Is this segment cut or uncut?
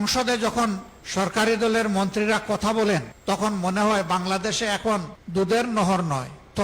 cut